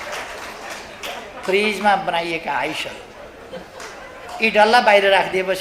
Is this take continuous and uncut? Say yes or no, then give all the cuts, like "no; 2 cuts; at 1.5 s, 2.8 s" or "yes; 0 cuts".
yes; 0 cuts